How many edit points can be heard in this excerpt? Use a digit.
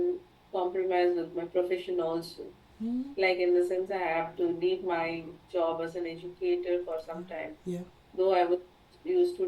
0